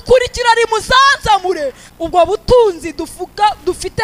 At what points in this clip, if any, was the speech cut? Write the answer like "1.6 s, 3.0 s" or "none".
1.8 s